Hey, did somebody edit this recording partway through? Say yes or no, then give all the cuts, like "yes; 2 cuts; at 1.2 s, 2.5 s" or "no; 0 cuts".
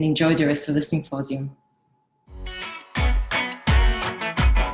yes; 1 cut; at 2.4 s